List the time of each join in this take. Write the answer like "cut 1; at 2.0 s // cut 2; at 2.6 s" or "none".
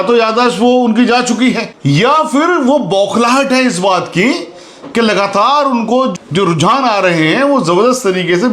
none